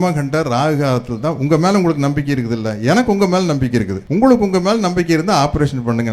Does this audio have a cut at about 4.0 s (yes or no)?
yes